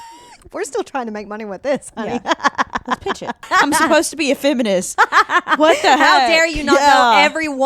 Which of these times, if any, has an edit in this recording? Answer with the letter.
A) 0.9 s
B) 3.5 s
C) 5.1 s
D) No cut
B